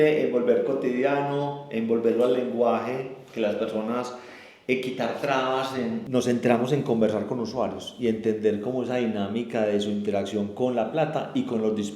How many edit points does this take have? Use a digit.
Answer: 1